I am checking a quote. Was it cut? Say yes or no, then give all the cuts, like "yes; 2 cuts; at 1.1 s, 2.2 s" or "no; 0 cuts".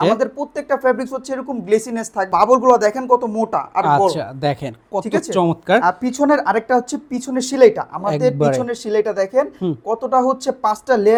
no; 0 cuts